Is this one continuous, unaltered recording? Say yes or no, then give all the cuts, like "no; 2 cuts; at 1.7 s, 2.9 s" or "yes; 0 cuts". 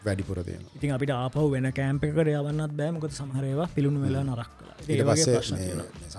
yes; 0 cuts